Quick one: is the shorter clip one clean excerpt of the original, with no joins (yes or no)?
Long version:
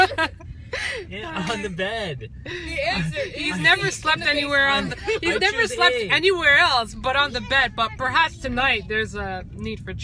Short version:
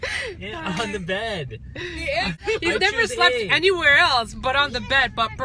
no